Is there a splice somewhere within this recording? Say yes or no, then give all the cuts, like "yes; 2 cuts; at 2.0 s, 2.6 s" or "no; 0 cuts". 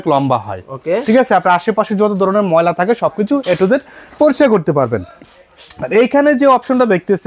no; 0 cuts